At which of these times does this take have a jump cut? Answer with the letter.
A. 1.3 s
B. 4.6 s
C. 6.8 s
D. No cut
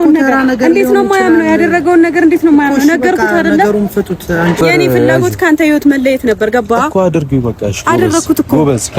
B